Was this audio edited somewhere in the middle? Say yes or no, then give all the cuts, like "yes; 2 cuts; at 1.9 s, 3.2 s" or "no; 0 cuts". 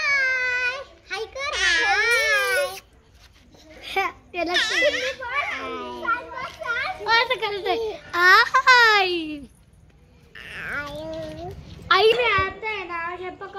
yes; 1 cut; at 12.1 s